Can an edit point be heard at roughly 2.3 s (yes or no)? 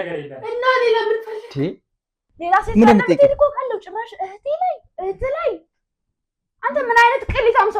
yes